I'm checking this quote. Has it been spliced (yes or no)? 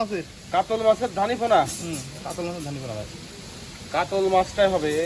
no